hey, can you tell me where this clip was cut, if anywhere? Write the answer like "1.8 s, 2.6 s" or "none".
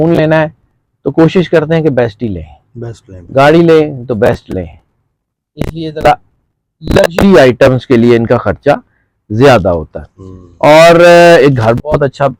none